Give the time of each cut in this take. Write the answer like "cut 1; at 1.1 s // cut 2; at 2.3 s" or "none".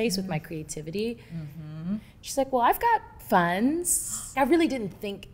cut 1; at 4.3 s